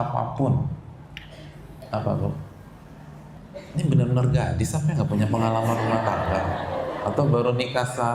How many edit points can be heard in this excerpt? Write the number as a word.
one